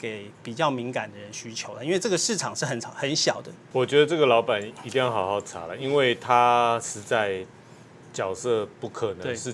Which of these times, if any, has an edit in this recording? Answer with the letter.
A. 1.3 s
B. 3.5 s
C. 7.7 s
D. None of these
B